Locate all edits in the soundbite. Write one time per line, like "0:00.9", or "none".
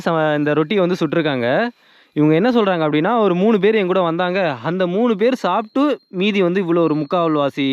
none